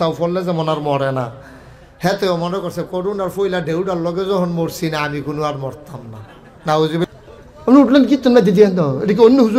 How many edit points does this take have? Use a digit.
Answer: 1